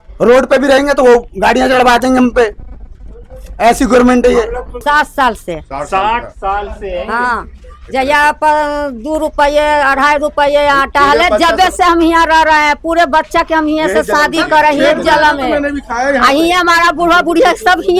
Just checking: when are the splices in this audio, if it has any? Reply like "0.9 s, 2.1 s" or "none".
4.7 s